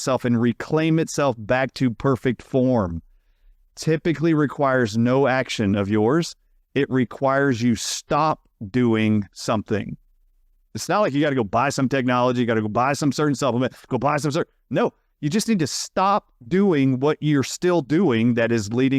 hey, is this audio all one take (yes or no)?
yes